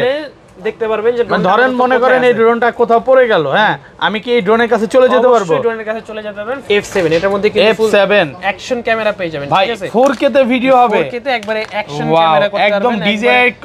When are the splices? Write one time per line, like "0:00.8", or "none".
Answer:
0:06.6